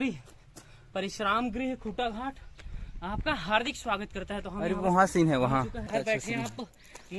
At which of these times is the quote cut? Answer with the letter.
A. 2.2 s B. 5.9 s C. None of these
B